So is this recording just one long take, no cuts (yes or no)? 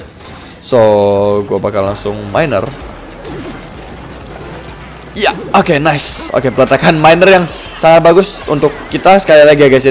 yes